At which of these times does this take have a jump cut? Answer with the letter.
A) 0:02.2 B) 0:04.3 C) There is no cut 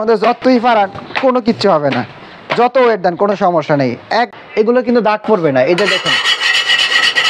B